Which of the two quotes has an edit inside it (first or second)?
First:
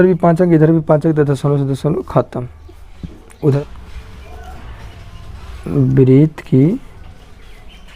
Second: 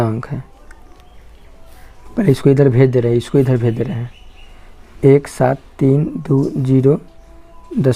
first